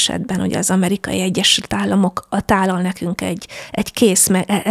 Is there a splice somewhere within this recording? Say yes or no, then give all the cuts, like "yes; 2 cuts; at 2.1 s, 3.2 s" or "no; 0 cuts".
no; 0 cuts